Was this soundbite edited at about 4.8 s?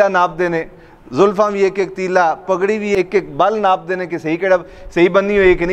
no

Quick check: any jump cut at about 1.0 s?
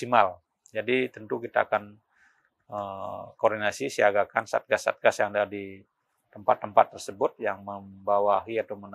no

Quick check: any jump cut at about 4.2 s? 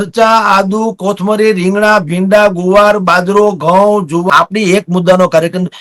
yes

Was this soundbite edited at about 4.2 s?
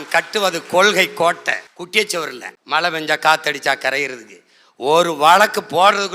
no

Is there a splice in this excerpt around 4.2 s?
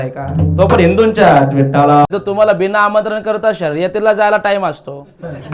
no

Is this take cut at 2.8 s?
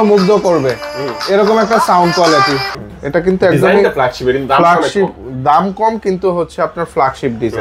yes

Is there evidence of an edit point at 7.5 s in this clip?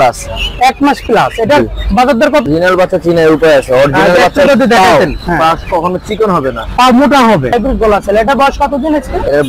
yes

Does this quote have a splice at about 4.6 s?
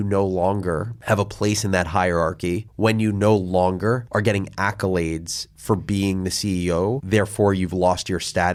no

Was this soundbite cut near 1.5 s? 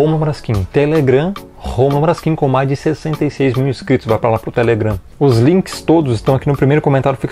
no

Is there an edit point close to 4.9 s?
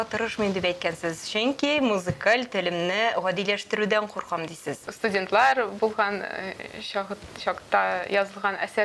yes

